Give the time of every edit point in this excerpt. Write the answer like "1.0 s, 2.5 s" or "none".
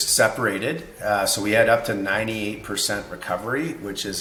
none